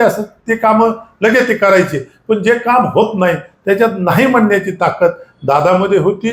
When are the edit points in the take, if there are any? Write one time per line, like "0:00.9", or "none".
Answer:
none

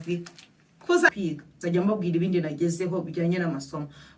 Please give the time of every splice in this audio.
0:01.1

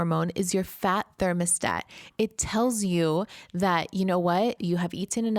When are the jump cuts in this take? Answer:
none

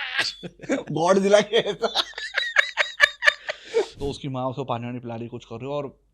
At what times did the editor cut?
0:03.9

